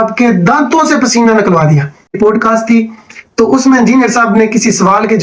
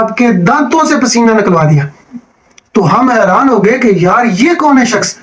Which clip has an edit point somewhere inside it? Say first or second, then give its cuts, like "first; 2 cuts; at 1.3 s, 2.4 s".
first; 1 cut; at 2.2 s